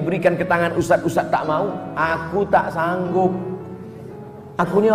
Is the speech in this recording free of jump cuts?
yes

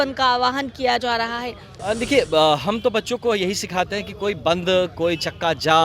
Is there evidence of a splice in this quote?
yes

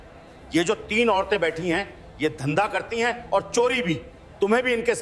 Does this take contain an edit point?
no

